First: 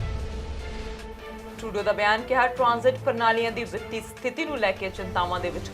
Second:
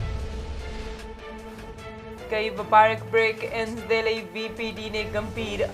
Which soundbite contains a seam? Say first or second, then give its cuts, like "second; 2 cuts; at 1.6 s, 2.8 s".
first; 1 cut; at 1.6 s